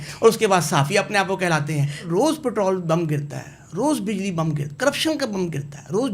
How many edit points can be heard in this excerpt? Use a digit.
2